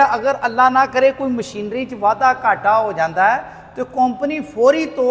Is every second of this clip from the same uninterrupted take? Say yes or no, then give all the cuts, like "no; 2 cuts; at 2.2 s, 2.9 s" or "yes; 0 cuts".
yes; 0 cuts